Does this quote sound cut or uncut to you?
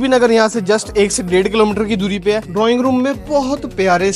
cut